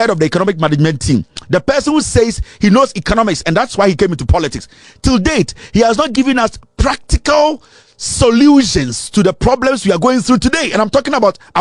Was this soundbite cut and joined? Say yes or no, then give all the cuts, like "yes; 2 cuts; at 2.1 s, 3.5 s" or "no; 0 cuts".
no; 0 cuts